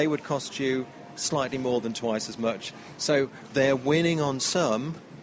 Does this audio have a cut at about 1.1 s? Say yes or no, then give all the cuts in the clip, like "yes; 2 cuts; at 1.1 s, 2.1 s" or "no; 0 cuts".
no; 1 cut; at 3.0 s